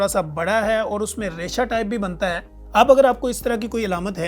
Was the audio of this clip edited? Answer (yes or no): yes